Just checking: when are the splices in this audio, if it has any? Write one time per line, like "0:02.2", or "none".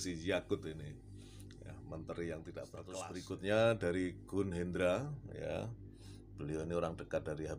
0:03.0